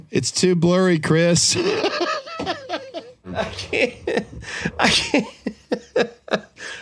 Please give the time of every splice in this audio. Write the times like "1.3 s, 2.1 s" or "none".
3.3 s